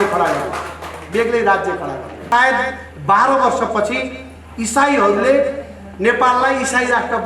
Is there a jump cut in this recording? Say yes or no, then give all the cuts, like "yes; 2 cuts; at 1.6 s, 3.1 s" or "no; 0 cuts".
yes; 1 cut; at 2.3 s